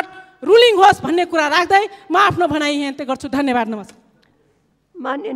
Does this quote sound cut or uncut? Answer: uncut